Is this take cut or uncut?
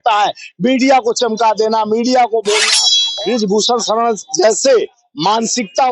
cut